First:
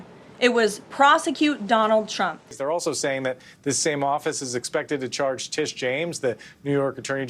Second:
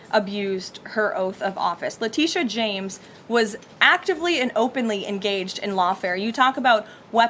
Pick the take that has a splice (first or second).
first